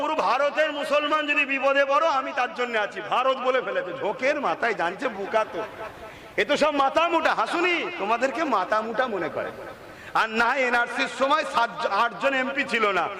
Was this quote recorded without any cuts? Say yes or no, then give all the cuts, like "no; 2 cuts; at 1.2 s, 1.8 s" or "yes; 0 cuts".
yes; 0 cuts